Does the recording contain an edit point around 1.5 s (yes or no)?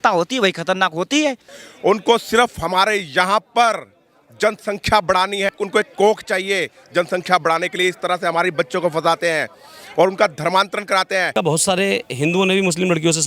yes